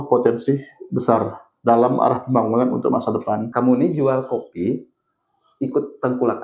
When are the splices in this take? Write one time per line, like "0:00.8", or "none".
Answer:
0:03.5